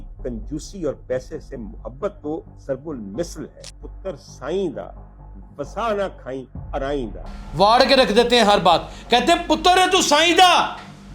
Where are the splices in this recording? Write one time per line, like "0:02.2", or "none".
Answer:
0:07.2

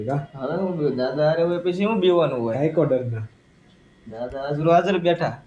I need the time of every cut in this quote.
none

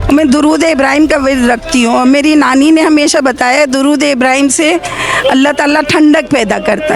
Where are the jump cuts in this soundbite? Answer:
none

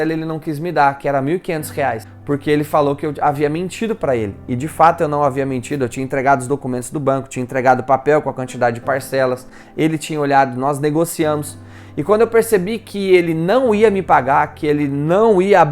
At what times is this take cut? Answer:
0:02.1

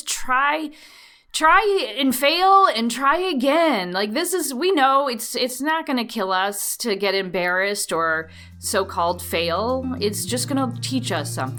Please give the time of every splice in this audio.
none

